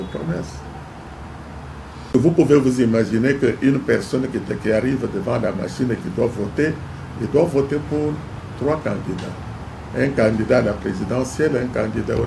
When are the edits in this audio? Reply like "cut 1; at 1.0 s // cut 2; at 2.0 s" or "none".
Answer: cut 1; at 2.1 s